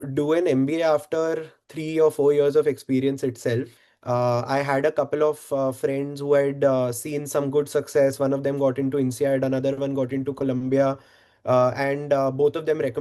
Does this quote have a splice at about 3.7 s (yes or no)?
yes